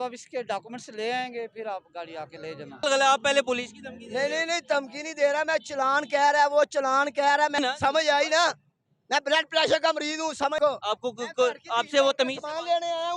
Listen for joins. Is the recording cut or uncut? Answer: cut